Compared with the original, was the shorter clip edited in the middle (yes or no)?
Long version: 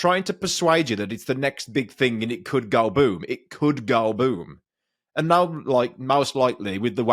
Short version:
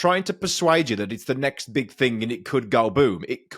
no